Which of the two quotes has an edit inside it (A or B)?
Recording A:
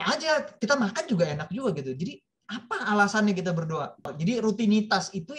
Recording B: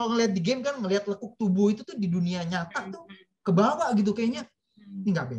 A